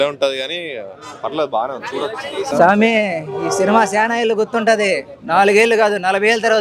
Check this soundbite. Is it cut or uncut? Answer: cut